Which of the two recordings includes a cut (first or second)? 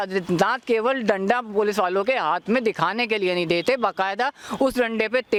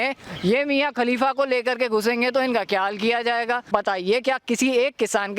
second